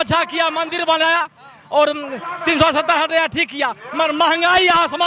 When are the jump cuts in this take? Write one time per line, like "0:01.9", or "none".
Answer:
none